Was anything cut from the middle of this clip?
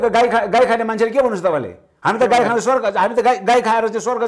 no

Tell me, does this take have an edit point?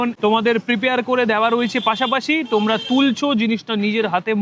no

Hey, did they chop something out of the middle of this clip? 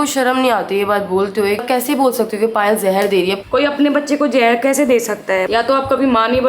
yes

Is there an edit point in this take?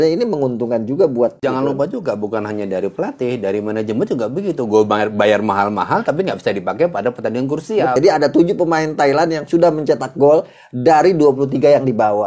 yes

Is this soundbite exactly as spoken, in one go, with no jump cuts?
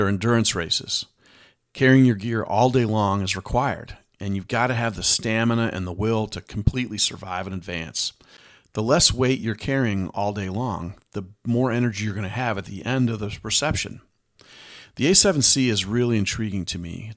no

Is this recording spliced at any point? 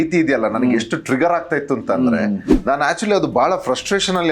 no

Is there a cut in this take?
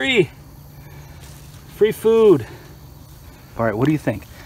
yes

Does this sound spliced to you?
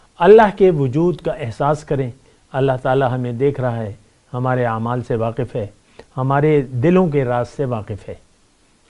no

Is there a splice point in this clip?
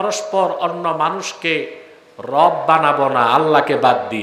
no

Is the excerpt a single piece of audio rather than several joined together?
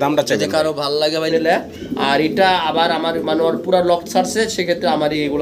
no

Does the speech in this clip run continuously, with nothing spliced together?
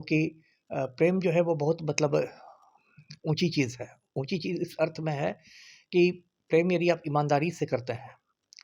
yes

